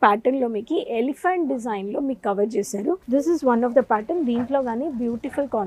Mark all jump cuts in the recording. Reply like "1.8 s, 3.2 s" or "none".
3.0 s

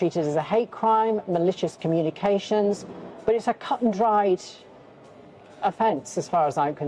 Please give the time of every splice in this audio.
none

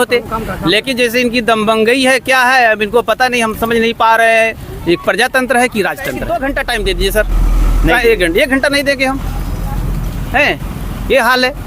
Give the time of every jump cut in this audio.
6.2 s

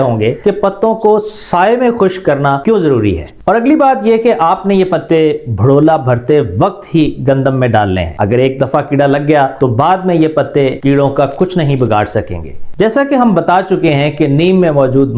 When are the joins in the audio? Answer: none

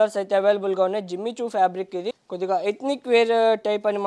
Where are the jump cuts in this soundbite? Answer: 2.2 s

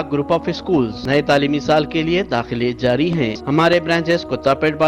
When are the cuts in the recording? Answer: 1.0 s, 3.4 s

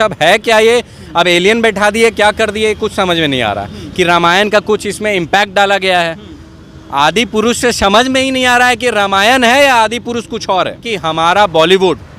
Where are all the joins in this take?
10.8 s

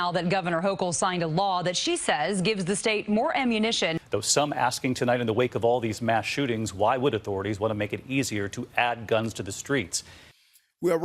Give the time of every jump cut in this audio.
4.0 s

